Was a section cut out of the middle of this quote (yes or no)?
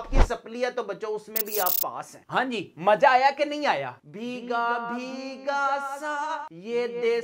yes